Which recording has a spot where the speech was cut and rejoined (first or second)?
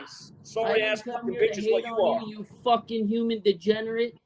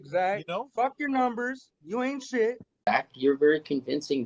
second